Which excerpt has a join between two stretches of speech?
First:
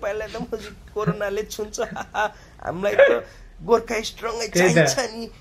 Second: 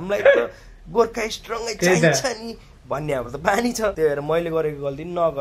second; 1 cut; at 3.9 s

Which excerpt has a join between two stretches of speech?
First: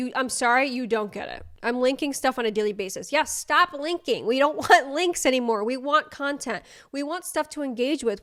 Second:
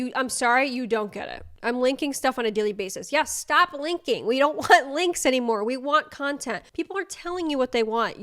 second; 1 cut; at 6.7 s

